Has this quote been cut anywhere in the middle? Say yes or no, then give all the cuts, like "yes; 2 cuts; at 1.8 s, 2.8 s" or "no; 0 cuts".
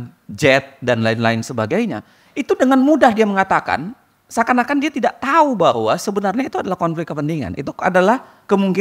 no; 0 cuts